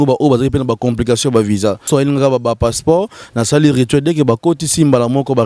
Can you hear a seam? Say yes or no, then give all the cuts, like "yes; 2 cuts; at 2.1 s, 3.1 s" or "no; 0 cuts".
yes; 1 cut; at 1.9 s